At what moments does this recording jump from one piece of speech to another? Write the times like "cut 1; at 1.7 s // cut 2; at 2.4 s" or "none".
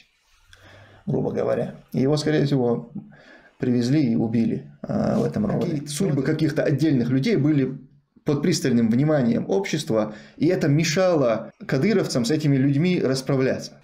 cut 1; at 5.9 s // cut 2; at 11.5 s